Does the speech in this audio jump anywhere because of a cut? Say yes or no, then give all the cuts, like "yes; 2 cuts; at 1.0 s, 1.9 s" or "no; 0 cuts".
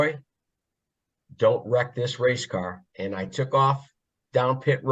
yes; 1 cut; at 2.8 s